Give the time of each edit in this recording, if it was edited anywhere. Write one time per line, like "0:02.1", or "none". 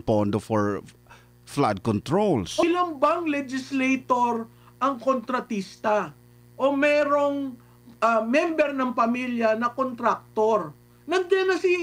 0:02.6